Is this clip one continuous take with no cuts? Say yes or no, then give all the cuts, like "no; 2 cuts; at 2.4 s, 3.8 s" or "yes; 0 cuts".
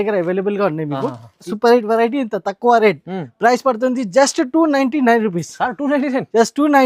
no; 1 cut; at 1.5 s